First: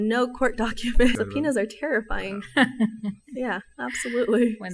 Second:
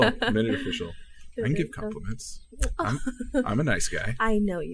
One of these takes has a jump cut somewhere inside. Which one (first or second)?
first